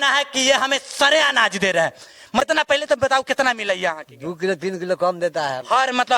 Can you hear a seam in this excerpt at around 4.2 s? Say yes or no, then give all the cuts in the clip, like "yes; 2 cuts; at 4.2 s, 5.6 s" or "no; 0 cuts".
no; 1 cut; at 2.4 s